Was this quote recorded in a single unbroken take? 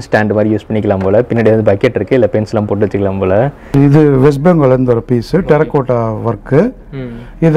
no; 1 cut; at 3.6 s

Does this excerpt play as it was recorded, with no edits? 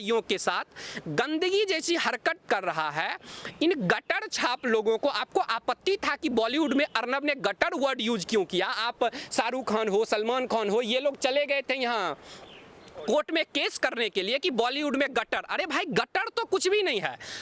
yes; 0 cuts

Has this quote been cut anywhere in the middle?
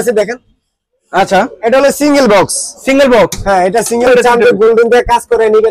yes; 1 cut; at 4.1 s

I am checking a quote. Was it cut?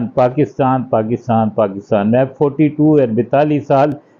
no; 0 cuts

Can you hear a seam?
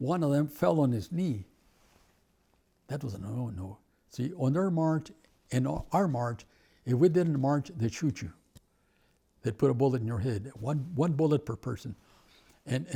no; 0 cuts

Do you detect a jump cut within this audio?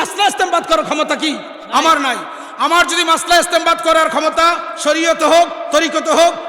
no; 0 cuts

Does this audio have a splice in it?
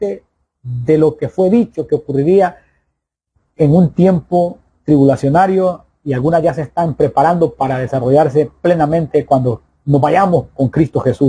no; 0 cuts

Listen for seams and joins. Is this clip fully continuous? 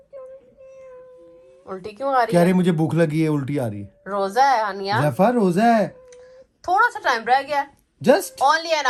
yes; 0 cuts

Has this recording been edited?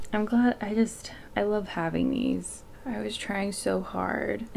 yes; 1 cut; at 2.8 s

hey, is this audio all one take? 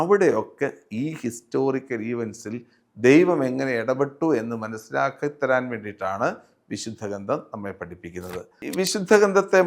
no; 1 cut; at 8.6 s

